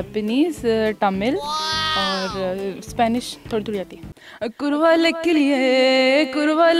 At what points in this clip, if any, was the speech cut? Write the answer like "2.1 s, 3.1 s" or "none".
4.2 s

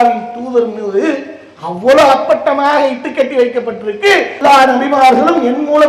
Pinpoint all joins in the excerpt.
4.3 s

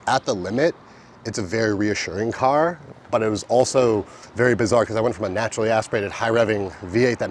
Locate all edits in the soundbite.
none

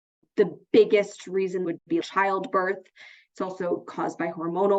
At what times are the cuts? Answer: 1.8 s

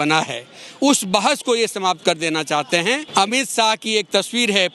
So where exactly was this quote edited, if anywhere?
3.0 s

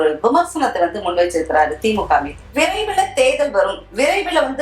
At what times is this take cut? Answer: 2.4 s

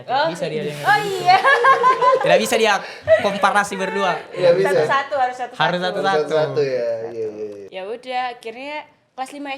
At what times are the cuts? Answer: none

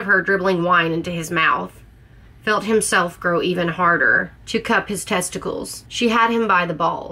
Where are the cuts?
4.3 s, 5.8 s

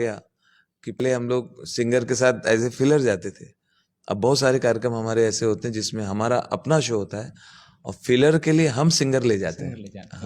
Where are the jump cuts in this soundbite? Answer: 1.0 s

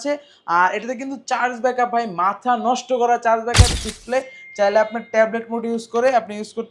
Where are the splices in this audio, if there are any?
3.7 s

